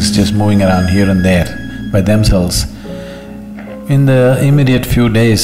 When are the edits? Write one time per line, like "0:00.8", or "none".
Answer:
none